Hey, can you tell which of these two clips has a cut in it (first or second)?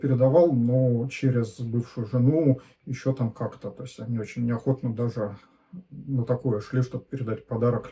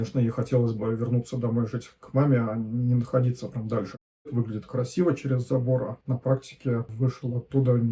second